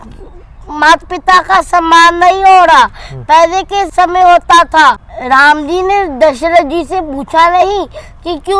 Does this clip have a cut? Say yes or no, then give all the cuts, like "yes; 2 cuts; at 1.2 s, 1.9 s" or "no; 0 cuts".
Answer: yes; 2 cuts; at 3.9 s, 5.1 s